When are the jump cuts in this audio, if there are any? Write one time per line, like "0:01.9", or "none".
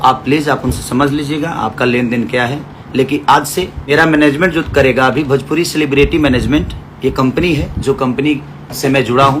0:03.9